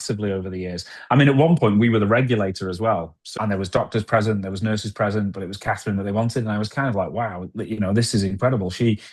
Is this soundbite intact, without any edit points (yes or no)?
no